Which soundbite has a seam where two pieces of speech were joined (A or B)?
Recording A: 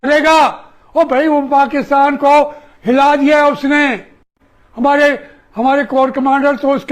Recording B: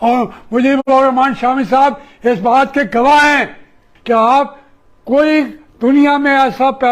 B